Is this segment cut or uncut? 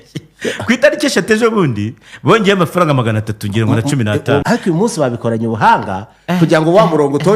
cut